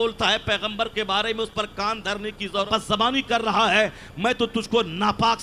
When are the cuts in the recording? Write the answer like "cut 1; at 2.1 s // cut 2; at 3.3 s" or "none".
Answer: cut 1; at 2.7 s